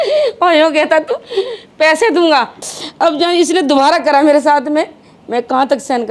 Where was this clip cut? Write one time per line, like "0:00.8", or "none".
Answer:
0:02.6